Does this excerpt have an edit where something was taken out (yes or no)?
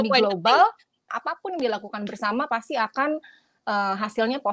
yes